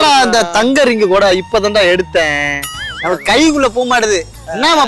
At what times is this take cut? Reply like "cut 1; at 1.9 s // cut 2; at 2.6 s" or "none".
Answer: none